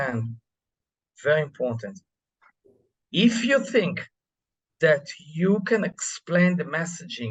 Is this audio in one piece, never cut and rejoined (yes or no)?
yes